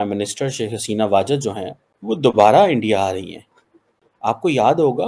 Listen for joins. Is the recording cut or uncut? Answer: uncut